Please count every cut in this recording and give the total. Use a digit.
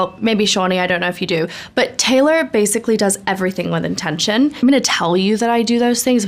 1